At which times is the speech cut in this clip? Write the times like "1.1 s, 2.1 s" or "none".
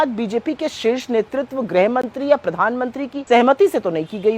3.1 s